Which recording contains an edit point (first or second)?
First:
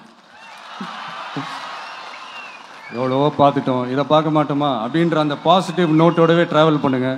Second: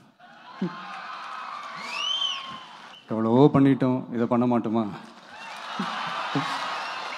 second